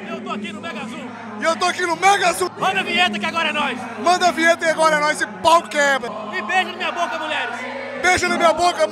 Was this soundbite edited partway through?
yes; 2 cuts; at 2.5 s, 6.1 s

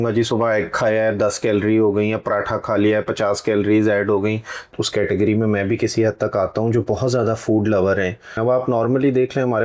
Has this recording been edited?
yes; 2 cuts; at 4.7 s, 8.4 s

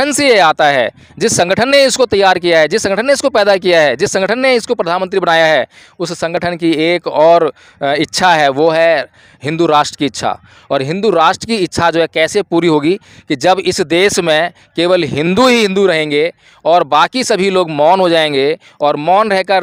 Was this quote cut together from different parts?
no; 0 cuts

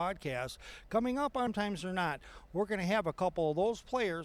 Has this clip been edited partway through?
yes; 1 cut; at 1.5 s

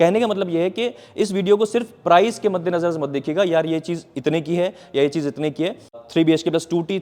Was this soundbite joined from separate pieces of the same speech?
yes; 1 cut; at 6.0 s

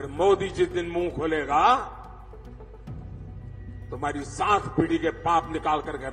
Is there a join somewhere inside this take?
yes; 2 cuts; at 2.0 s, 3.7 s

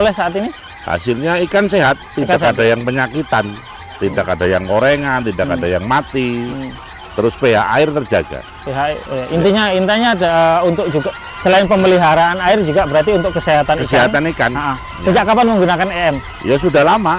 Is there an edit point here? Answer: no; 0 cuts

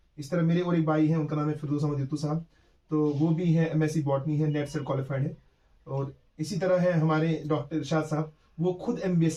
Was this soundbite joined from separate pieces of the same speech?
no; 0 cuts

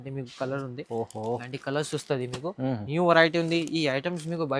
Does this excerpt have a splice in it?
no; 0 cuts

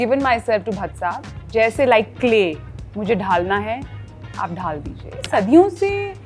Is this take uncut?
no; 2 cuts; at 1.4 s, 5.3 s

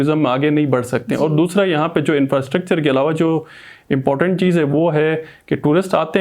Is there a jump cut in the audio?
no; 0 cuts

